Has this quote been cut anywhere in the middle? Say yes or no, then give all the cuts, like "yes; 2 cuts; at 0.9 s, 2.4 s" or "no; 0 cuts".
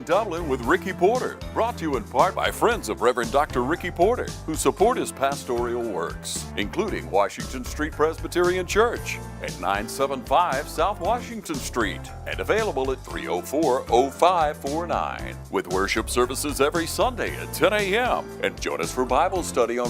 yes; 1 cut; at 1.3 s